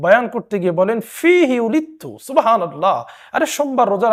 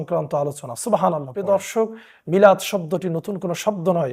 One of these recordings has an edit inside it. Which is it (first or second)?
second